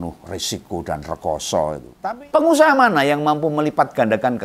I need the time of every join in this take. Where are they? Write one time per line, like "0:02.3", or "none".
0:01.8